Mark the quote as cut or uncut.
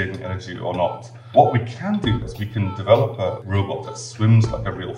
cut